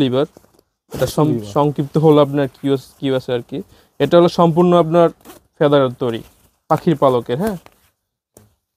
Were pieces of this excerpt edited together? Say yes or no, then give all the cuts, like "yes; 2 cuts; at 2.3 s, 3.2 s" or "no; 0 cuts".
no; 0 cuts